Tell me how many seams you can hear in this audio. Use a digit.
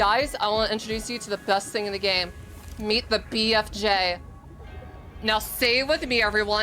0